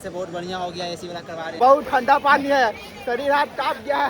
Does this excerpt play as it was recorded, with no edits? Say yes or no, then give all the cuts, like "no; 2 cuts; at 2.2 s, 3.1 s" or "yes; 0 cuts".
no; 1 cut; at 1.4 s